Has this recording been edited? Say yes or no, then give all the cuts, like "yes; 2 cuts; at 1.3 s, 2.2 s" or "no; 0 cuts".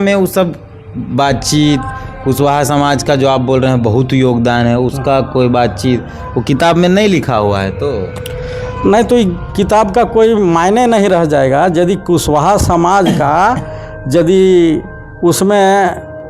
no; 0 cuts